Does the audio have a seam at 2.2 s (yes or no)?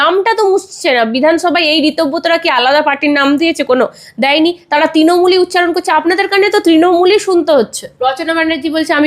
no